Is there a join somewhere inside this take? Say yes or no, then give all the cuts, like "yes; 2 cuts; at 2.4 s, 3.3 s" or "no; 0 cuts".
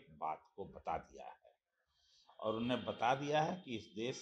no; 0 cuts